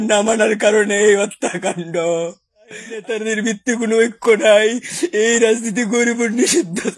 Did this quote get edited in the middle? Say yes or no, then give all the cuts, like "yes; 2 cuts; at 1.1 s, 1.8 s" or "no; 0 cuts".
yes; 1 cut; at 3.0 s